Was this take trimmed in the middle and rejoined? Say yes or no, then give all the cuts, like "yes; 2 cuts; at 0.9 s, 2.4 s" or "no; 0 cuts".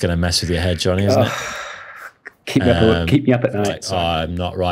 yes; 1 cut; at 3.8 s